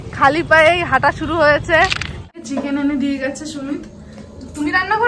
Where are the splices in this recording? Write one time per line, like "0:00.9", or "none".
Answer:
0:02.4